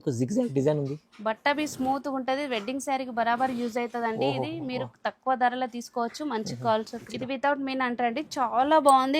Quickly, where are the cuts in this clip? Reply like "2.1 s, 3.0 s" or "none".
7.0 s